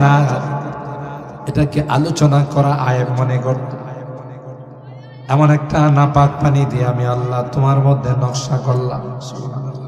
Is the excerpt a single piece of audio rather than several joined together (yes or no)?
yes